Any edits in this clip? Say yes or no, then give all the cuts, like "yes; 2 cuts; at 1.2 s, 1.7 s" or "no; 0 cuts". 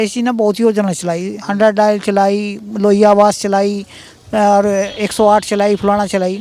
no; 0 cuts